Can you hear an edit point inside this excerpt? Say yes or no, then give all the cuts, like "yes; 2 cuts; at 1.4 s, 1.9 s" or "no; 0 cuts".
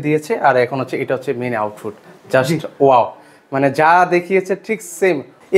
no; 0 cuts